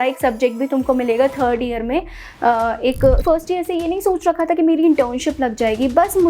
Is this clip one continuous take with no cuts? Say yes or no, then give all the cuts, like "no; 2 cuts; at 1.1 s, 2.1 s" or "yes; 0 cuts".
no; 1 cut; at 3.2 s